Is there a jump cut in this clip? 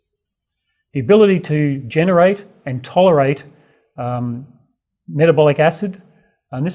no; 0 cuts

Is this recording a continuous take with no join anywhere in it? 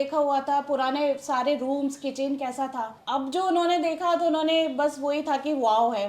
yes; 0 cuts

